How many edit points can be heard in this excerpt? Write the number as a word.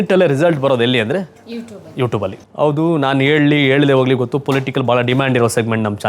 one